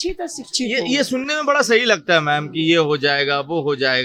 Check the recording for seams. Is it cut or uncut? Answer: uncut